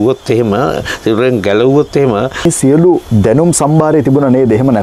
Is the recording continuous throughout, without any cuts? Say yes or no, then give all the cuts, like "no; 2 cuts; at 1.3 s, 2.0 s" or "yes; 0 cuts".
no; 1 cut; at 2.4 s